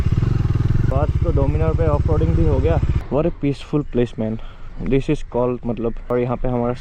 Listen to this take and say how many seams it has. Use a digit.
3